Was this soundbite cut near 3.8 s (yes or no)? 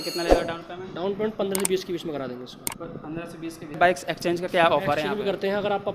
yes